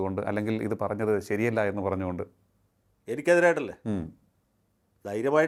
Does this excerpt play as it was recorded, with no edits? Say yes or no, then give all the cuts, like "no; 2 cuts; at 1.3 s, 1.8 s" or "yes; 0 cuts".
yes; 0 cuts